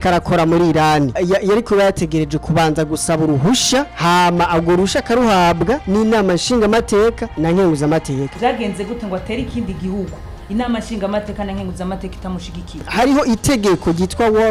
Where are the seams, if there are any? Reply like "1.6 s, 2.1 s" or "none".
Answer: 1.2 s, 3.9 s, 5.8 s, 7.3 s, 8.3 s, 12.9 s